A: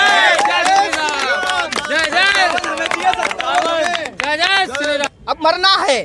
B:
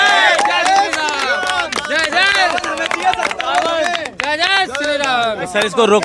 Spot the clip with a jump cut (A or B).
A